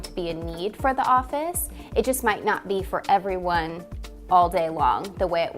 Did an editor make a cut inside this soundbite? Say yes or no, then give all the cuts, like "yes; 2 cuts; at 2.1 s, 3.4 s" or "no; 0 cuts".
no; 0 cuts